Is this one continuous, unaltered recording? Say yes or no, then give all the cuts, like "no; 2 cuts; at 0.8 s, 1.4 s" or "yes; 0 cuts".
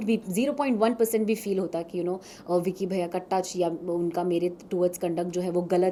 yes; 0 cuts